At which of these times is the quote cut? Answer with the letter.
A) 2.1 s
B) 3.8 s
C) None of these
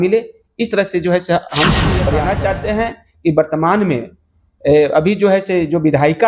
A